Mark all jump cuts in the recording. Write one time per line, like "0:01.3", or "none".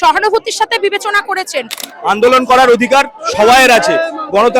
0:01.8